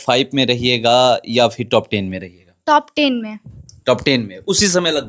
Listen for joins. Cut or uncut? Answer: uncut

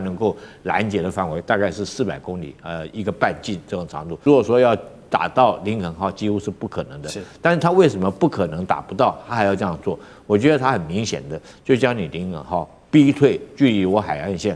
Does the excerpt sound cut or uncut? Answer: cut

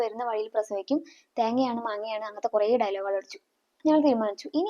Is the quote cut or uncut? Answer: cut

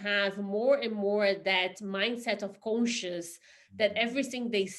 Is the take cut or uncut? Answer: uncut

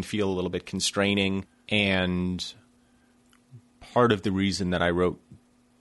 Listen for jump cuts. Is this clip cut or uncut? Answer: cut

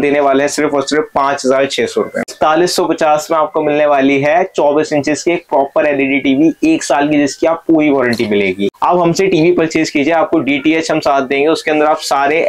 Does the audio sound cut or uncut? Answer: cut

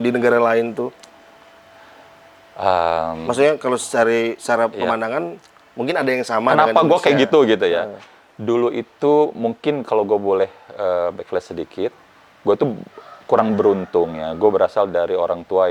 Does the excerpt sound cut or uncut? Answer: uncut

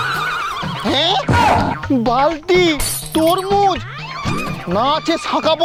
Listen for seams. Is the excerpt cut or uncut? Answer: uncut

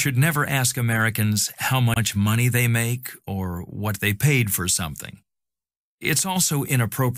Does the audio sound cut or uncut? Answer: uncut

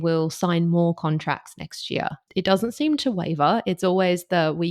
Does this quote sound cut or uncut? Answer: cut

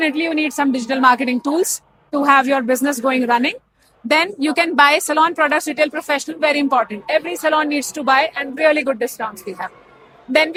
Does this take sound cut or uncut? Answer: uncut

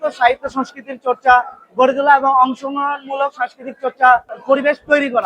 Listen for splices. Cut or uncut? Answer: cut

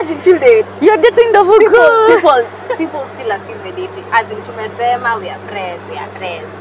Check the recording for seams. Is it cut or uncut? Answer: uncut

